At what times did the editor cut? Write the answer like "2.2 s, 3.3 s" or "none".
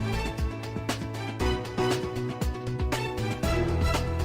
2.3 s